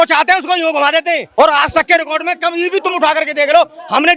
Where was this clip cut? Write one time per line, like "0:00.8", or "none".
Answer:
0:01.2